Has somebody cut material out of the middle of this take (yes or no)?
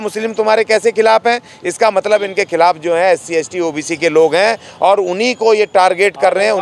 no